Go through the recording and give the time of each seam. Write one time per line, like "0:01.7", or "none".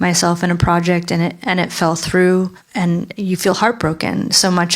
0:02.6